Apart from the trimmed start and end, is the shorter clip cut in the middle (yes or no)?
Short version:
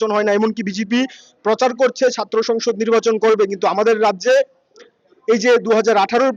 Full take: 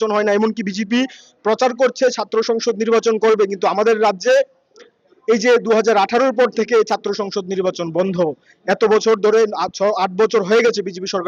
no